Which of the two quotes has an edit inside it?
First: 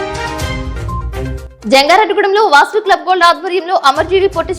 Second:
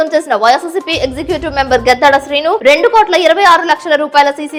first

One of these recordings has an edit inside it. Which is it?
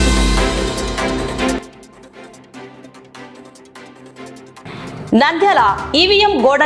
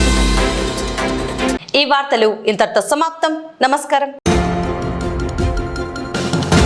first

